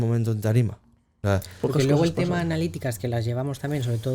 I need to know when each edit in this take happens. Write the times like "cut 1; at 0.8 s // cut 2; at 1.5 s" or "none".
cut 1; at 1.1 s